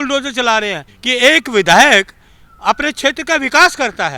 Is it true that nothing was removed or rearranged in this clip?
no; 1 cut; at 0.9 s

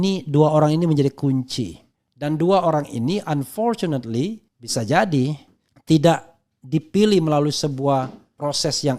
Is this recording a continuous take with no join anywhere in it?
yes; 0 cuts

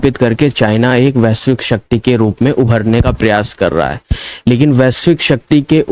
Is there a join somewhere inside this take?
no; 0 cuts

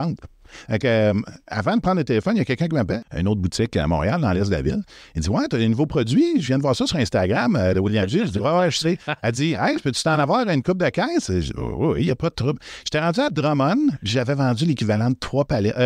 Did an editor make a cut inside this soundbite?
yes; 1 cut; at 3.0 s

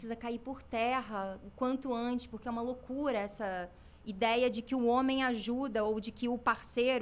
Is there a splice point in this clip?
no; 0 cuts

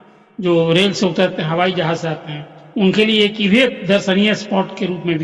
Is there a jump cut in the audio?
no; 0 cuts

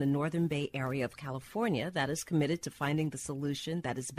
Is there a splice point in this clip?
no; 0 cuts

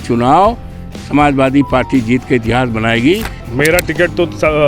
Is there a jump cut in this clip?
yes; 1 cut; at 3.4 s

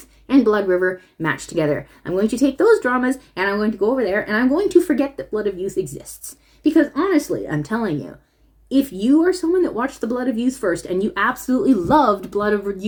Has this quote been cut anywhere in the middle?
no; 0 cuts

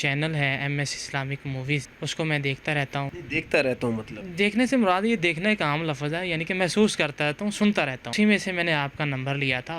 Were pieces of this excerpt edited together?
yes; 4 cuts; at 1.9 s, 3.2 s, 4.2 s, 8.1 s

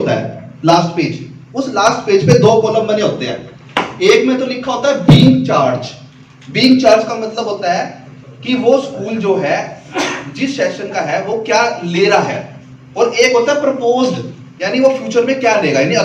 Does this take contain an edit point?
no; 0 cuts

